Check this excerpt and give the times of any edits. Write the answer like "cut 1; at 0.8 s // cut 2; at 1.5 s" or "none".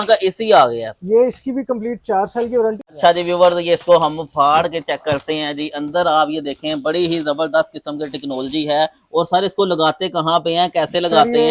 cut 1; at 2.9 s